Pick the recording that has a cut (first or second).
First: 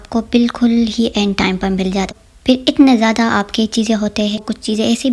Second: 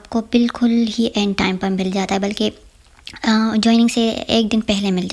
first